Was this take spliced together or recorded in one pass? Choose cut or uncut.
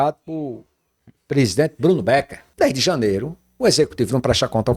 cut